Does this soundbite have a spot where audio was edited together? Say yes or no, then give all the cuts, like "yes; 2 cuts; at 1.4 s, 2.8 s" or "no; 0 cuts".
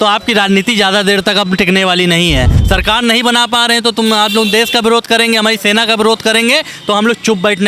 yes; 1 cut; at 2.6 s